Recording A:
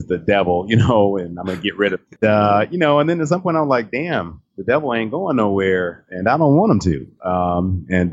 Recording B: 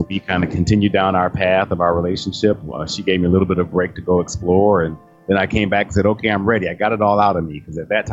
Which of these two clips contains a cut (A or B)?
A